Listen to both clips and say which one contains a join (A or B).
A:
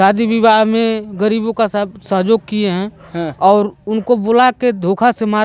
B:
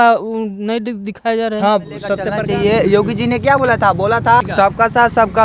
B